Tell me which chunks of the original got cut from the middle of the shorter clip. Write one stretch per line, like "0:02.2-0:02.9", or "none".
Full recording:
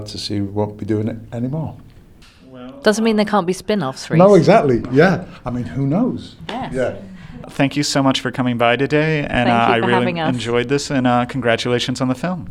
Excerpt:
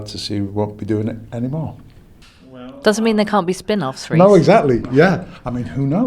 none

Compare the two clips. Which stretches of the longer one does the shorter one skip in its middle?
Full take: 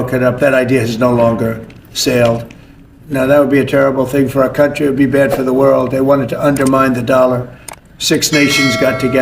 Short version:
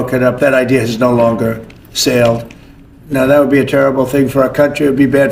none

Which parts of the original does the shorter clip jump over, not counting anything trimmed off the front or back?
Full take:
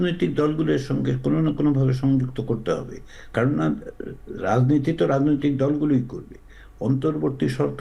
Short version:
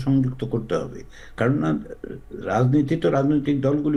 none

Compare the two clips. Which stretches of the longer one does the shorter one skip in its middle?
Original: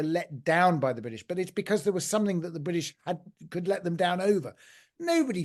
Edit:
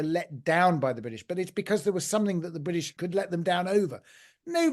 0:02.9-0:03.5

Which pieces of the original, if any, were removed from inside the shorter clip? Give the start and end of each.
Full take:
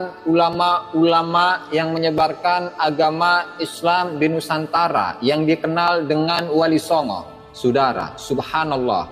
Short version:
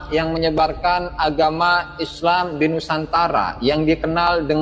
none

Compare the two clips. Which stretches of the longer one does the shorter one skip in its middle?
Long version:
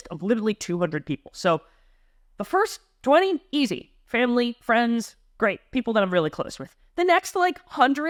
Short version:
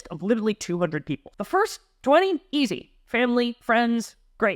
0:01.2-0:02.2

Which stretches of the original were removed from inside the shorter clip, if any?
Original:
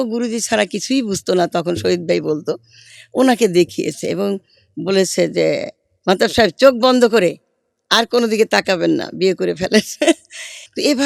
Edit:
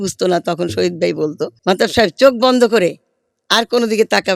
0:02.5-0:05.9

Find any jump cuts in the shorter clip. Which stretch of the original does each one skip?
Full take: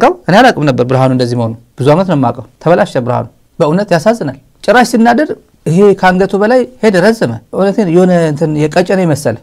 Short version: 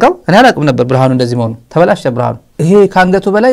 0:01.6-0:02.5
0:03.4-0:05.5

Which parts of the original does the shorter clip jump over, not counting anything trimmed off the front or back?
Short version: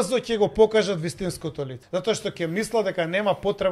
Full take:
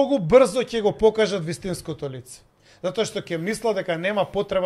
0:02.2-0:02.6

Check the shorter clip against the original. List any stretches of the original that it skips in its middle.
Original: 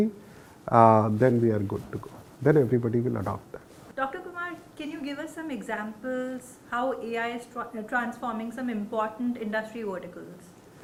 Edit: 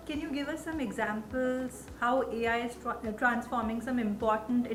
none

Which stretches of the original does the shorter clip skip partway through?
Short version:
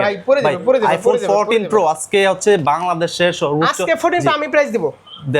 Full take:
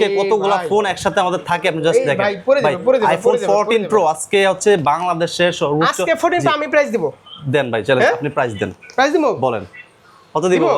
none

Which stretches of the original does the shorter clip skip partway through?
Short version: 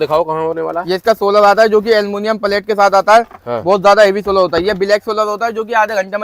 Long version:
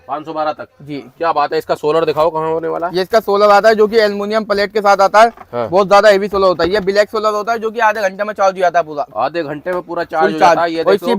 none

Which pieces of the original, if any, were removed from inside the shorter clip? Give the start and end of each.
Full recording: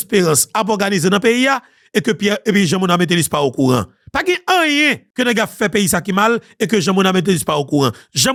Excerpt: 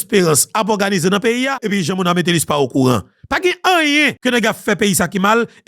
0:01.6-0:02.5
0:05.0-0:05.1

